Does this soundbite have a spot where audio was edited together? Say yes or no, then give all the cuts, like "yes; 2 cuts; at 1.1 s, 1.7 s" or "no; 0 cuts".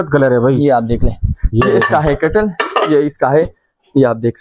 no; 0 cuts